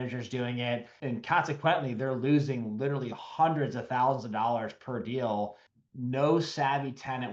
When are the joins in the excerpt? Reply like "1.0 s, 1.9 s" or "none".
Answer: 0.9 s, 5.7 s